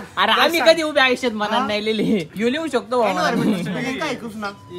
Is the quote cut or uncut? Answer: uncut